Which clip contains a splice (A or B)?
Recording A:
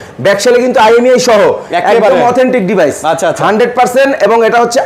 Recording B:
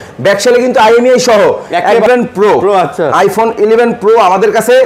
B